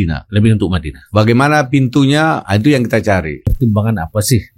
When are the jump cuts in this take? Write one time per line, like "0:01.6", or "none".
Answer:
0:03.4